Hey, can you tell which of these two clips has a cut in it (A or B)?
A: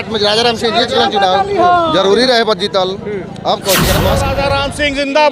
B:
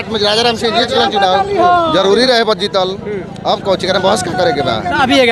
A